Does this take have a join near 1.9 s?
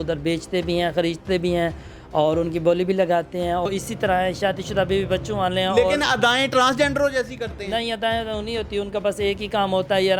no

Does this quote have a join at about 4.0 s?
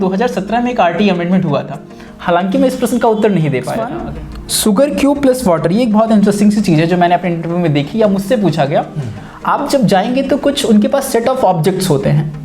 yes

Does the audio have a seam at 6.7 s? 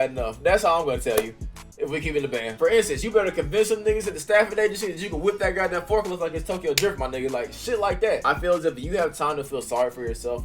no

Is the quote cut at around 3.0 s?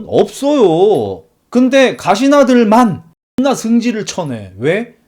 yes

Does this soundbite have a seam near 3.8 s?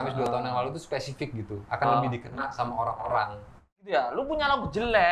yes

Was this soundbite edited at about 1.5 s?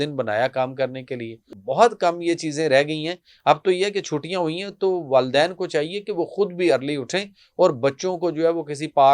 yes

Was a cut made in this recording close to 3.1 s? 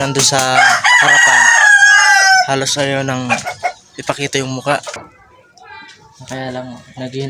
no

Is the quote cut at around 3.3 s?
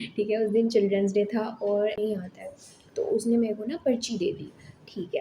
no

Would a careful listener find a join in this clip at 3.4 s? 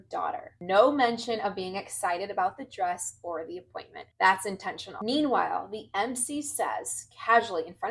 no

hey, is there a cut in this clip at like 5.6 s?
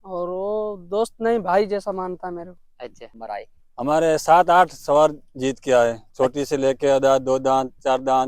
no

